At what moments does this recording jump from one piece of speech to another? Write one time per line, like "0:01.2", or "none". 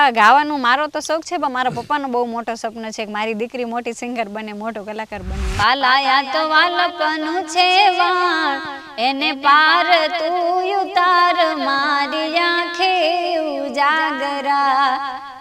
0:05.5